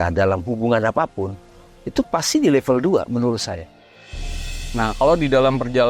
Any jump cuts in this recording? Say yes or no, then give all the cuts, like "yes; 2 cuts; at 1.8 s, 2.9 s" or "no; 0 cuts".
yes; 1 cut; at 4.3 s